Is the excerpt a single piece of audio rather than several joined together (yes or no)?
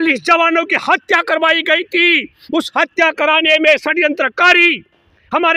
yes